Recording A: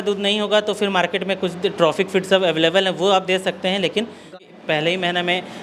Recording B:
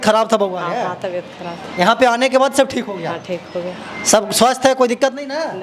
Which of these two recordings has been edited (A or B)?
A